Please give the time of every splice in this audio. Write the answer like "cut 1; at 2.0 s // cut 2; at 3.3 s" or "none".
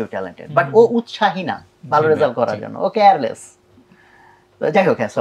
none